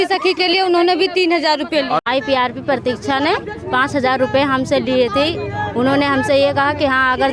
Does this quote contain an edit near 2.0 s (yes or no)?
yes